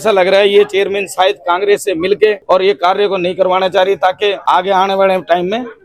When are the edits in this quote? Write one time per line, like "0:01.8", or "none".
0:02.4
0:04.4